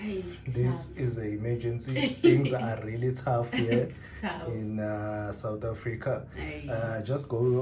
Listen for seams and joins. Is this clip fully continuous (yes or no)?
yes